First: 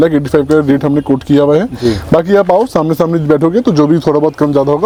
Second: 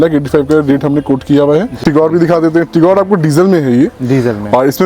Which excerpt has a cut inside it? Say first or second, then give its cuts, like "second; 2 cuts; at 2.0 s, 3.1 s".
second; 1 cut; at 1.8 s